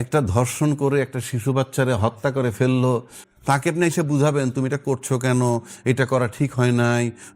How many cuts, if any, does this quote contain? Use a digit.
1